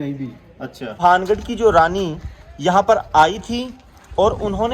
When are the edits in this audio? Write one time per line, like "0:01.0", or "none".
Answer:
0:01.0